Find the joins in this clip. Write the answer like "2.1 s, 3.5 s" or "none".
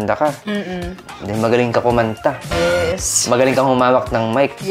none